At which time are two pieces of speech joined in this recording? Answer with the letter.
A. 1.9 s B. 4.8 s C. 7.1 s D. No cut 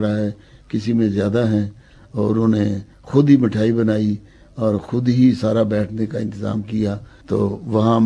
C